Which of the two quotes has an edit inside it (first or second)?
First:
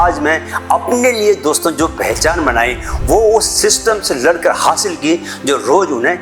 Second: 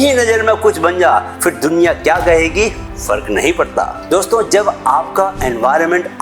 second